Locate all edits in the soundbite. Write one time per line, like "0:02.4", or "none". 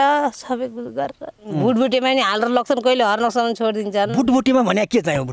0:01.5